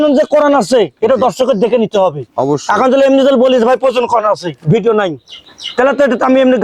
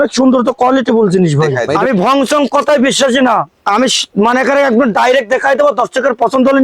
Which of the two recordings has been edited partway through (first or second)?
second